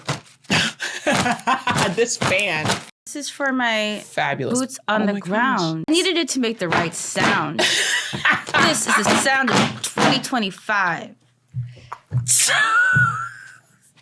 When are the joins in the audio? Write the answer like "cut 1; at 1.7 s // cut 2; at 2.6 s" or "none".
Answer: cut 1; at 2.9 s // cut 2; at 5.9 s